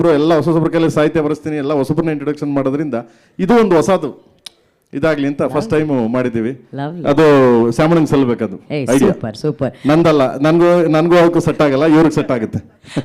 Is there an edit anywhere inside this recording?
no; 0 cuts

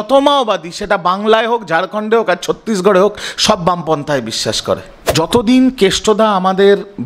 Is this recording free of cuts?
no; 1 cut; at 5.0 s

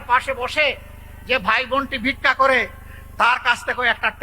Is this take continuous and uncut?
yes; 0 cuts

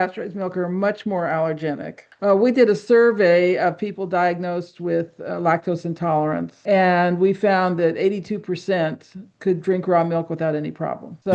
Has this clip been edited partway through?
no; 0 cuts

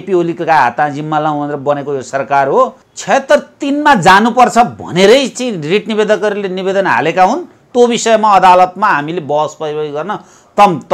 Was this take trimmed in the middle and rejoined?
yes; 1 cut; at 2.9 s

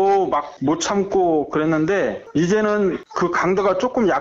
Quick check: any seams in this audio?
no; 0 cuts

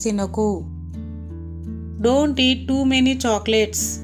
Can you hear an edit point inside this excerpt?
no; 0 cuts

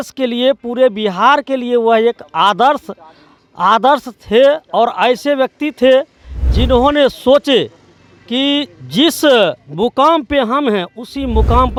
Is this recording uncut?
yes; 0 cuts

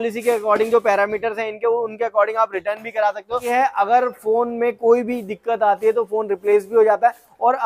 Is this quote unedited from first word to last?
no; 1 cut; at 3.5 s

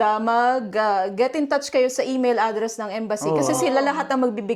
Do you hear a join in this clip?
no; 0 cuts

